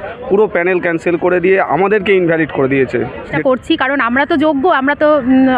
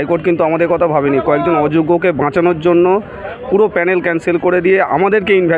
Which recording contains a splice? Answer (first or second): first